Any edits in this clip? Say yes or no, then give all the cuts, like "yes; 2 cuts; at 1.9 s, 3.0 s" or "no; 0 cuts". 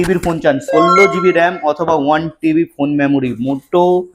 no; 0 cuts